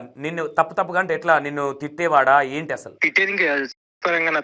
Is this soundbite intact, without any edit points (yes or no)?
no